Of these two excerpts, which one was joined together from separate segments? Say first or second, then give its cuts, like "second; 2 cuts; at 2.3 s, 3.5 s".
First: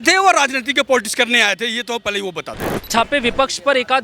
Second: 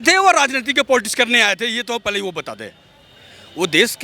first; 1 cut; at 2.9 s